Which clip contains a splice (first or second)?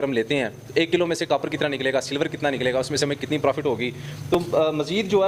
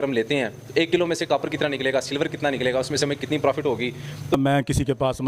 second